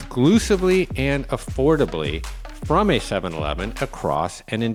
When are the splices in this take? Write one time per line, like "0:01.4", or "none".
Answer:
none